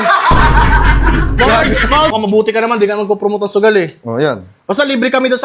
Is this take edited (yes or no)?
yes